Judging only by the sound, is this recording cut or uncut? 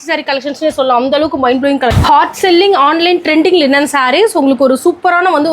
cut